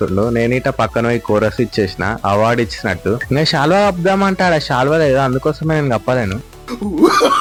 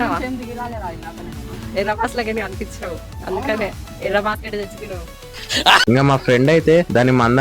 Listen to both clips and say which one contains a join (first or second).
second